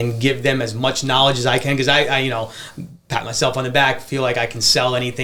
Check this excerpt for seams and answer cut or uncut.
uncut